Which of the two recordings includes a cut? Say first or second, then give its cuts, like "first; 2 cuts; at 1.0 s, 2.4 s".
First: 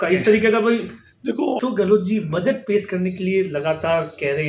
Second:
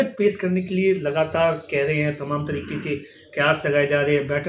first; 1 cut; at 1.6 s